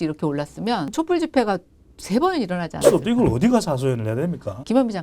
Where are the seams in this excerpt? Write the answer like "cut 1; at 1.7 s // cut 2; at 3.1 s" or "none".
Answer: cut 1; at 0.9 s // cut 2; at 2.9 s